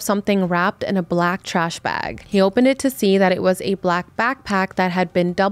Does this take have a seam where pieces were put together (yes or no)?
no